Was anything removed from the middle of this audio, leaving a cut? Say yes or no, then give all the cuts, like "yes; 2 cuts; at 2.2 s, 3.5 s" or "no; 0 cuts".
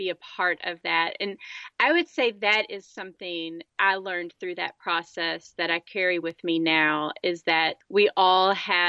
no; 0 cuts